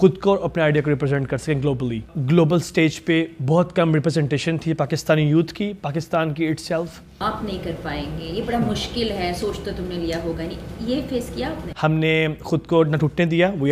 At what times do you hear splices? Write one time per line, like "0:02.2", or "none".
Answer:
0:02.1
0:07.1
0:11.6